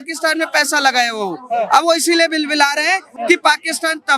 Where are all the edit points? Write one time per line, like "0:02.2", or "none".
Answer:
none